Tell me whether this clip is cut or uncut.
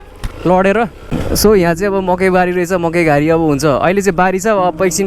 cut